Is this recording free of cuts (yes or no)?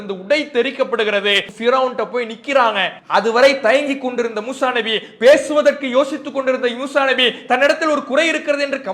no